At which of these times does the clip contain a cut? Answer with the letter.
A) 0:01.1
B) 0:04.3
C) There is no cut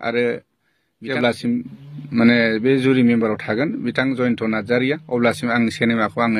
A